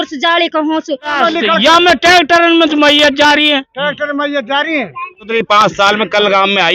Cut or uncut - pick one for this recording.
cut